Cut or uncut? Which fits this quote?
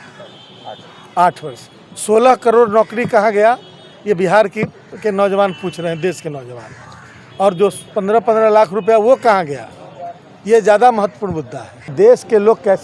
cut